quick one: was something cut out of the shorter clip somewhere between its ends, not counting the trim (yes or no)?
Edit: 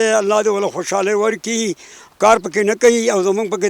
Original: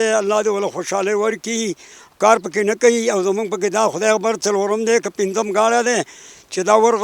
no